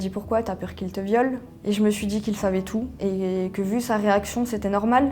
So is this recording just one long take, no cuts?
yes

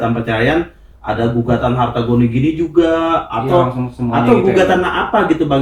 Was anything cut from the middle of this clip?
no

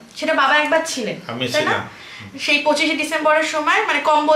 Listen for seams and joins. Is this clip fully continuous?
yes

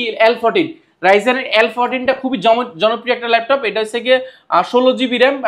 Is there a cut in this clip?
no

